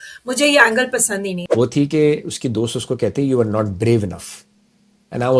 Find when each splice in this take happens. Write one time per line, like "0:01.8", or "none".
0:01.4